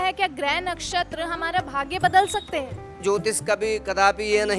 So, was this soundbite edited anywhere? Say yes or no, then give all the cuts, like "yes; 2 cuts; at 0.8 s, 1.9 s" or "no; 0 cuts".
yes; 1 cut; at 3.0 s